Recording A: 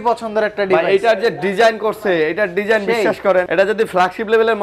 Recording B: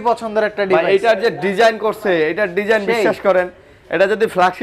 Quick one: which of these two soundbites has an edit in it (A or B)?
A